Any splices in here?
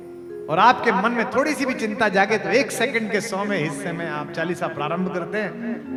no; 0 cuts

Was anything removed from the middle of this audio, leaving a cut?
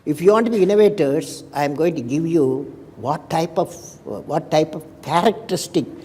no; 0 cuts

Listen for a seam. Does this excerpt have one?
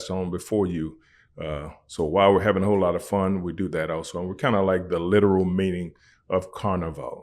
no; 0 cuts

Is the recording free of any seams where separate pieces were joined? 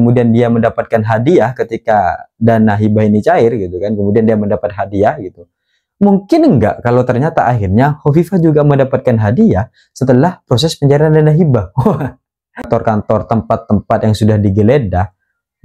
no; 1 cut; at 12.6 s

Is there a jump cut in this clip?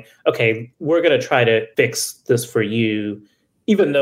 yes; 1 cut; at 1.7 s

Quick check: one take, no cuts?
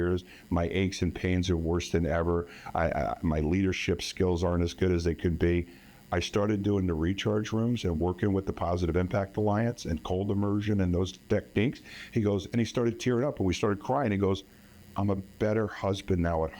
yes; 0 cuts

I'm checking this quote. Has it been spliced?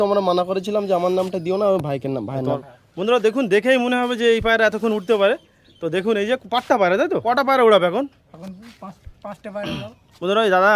yes; 2 cuts; at 2.6 s, 7.2 s

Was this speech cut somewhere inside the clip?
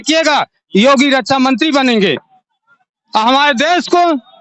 no; 0 cuts

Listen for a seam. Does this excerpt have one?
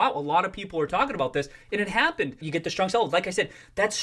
yes; 1 cut; at 2.4 s

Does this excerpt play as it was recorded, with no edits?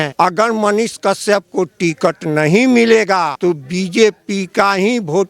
no; 1 cut; at 3.3 s

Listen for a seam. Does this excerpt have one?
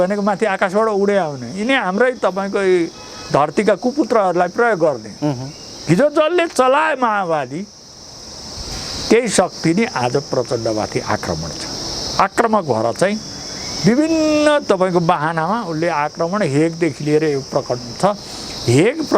no; 0 cuts

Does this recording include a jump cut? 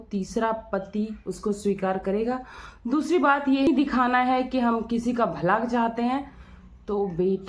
yes; 1 cut; at 3.7 s

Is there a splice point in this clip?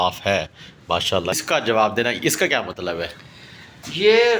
yes; 1 cut; at 1.4 s

